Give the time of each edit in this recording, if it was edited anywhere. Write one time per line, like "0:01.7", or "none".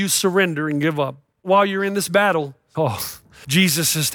0:01.4
0:02.9